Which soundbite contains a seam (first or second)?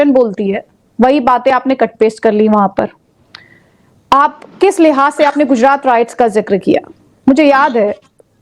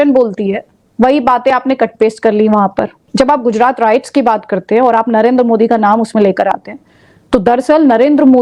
second